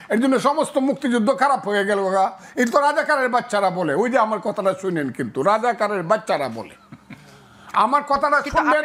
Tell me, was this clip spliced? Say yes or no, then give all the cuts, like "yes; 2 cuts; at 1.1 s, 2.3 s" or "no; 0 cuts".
no; 0 cuts